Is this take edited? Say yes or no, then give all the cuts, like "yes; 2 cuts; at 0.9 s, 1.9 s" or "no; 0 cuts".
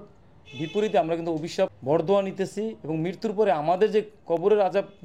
yes; 1 cut; at 1.8 s